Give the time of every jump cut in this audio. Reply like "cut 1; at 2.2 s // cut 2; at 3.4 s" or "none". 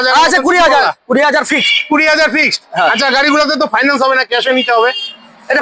none